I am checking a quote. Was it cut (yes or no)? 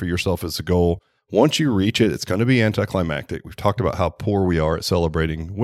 no